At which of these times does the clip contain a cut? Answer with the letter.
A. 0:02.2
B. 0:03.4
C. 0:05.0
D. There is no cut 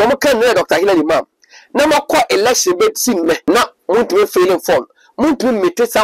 B